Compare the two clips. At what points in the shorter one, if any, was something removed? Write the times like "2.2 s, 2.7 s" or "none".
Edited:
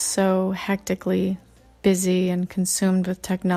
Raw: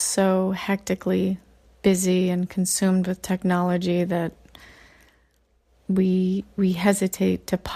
none

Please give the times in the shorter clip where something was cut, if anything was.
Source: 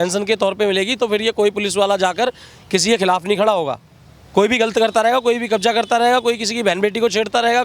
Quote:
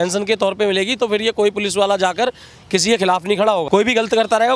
3.6 s

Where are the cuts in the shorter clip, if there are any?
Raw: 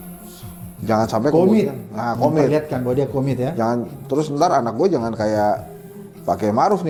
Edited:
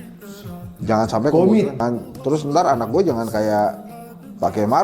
1.8 s

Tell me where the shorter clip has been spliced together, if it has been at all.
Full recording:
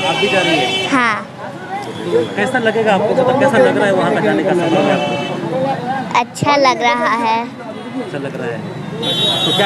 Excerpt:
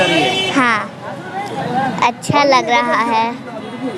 1.6 s

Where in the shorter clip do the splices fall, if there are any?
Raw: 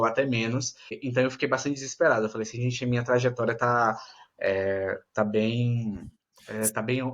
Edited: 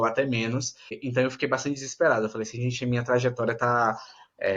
none

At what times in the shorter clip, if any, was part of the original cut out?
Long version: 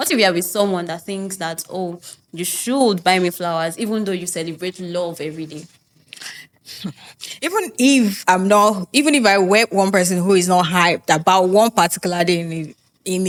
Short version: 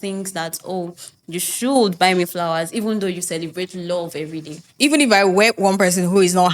4.7 s

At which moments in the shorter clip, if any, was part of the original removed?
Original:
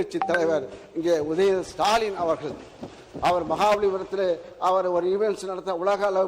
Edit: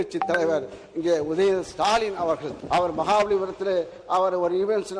2.5 s

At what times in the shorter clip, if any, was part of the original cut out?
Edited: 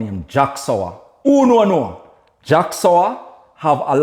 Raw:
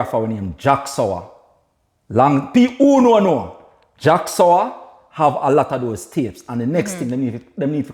1.2 s

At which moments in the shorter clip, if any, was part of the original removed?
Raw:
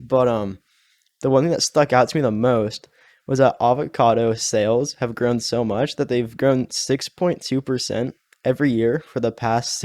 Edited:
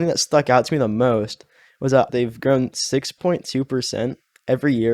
1.9 s

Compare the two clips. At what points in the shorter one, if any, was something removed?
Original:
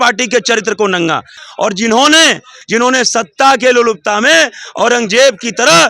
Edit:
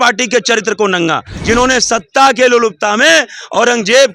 1.3 s

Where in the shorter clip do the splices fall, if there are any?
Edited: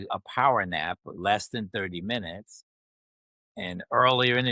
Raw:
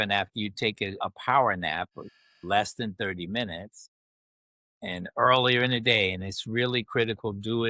1.1 s

